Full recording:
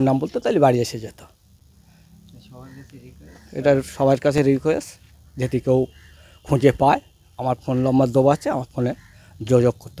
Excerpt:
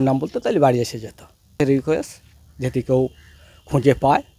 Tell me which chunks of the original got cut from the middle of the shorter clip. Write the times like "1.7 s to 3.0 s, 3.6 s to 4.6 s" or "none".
1.6 s to 4.4 s